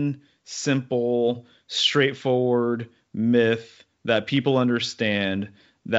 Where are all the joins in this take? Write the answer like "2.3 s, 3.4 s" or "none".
none